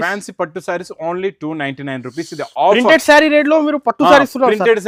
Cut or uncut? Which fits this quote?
uncut